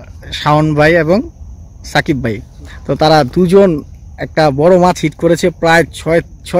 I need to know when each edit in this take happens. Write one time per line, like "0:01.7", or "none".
none

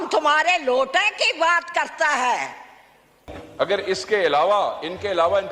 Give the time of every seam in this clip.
0:03.4

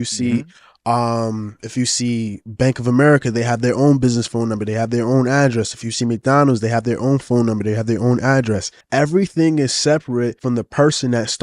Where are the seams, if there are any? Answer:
0:08.7
0:10.4

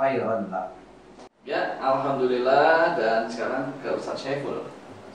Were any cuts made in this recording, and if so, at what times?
0:01.4

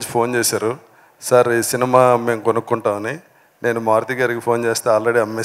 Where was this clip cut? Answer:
none

